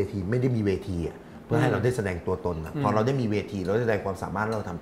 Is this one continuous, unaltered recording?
yes; 0 cuts

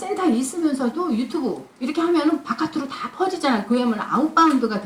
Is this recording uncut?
yes; 0 cuts

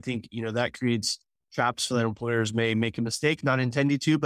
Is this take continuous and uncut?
yes; 0 cuts

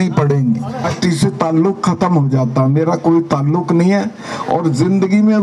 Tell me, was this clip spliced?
yes; 1 cut; at 0.9 s

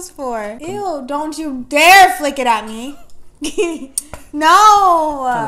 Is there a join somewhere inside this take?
no; 0 cuts

